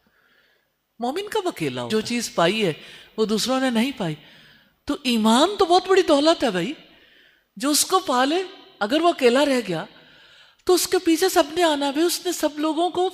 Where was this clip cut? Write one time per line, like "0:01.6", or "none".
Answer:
0:01.9

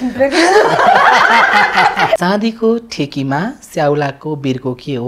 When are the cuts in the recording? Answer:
0:02.2

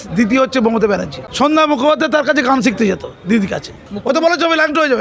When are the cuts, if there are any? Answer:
0:01.2
0:03.9

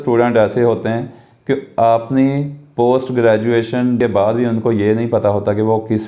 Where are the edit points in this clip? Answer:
none

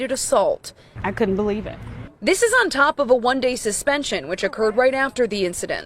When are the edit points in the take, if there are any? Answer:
0:01.0

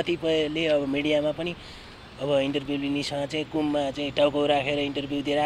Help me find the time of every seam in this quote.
none

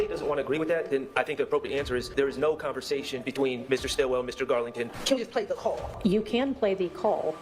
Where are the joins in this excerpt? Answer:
0:02.1
0:05.0
0:05.9

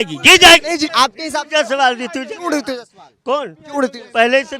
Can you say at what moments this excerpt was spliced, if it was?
0:00.9

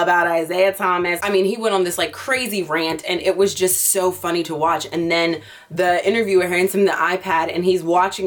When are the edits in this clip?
none

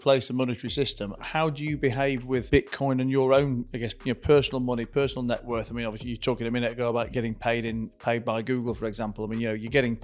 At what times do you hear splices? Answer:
none

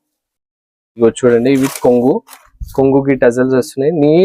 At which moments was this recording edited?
0:01.0

